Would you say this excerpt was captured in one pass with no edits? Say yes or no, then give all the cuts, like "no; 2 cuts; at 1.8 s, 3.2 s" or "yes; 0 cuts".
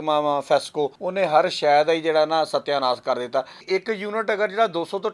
no; 2 cuts; at 1.0 s, 3.6 s